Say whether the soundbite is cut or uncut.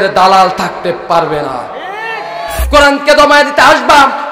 cut